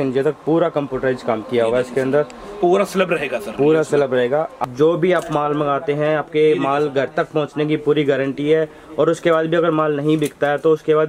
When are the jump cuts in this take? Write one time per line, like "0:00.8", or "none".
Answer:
0:04.6